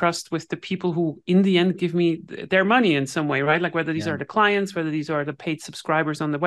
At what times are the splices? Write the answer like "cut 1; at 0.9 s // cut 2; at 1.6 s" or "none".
none